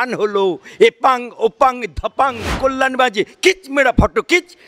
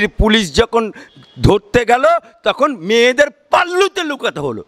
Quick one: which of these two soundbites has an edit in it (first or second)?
first